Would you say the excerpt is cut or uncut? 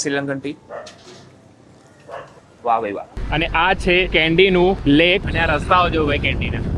cut